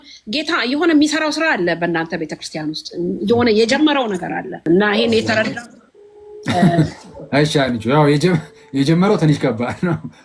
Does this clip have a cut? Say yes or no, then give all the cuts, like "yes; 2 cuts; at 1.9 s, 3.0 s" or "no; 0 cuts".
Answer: yes; 1 cut; at 4.5 s